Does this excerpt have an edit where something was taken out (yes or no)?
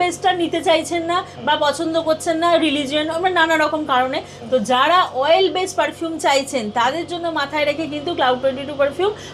no